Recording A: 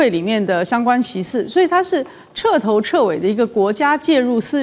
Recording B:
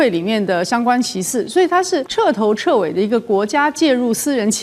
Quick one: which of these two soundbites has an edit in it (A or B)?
B